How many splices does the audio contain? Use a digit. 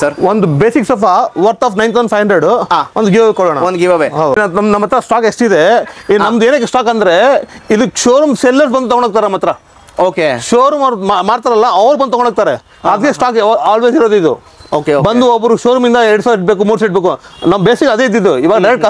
1